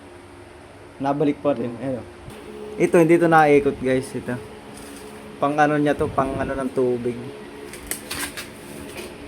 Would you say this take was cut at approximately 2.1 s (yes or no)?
yes